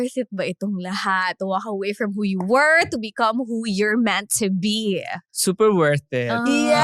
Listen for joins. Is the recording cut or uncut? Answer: uncut